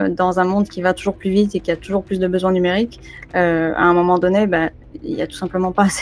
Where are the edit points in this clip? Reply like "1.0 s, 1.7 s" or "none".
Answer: none